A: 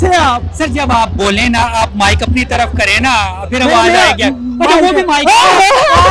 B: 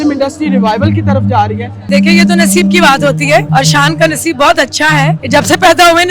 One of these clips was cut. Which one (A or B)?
B